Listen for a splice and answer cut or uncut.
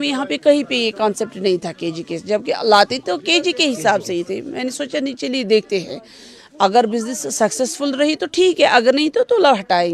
uncut